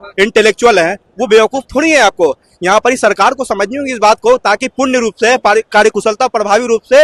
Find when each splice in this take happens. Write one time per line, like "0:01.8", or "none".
none